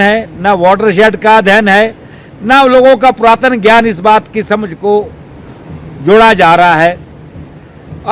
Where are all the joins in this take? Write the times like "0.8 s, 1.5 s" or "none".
none